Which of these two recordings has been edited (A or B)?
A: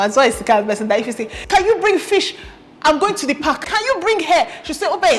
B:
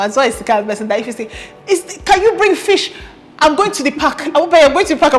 A